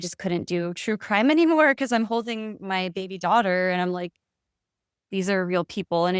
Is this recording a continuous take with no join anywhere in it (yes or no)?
yes